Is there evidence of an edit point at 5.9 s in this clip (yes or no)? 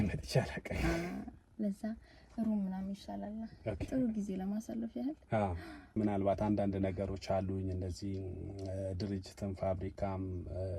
yes